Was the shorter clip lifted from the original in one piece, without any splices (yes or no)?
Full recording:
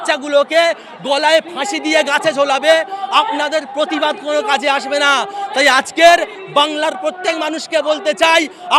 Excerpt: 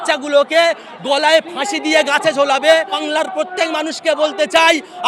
no